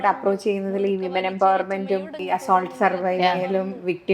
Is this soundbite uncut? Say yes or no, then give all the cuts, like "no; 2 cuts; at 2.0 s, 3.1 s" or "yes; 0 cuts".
no; 1 cut; at 2.1 s